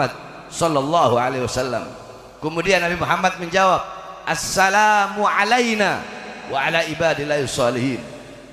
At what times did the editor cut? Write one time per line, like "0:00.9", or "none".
none